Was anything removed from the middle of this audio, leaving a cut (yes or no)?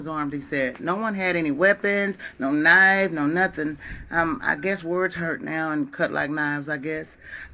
no